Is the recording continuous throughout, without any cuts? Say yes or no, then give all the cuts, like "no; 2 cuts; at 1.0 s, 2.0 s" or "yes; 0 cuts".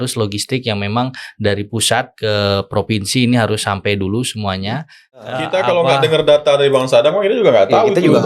no; 1 cut; at 5.3 s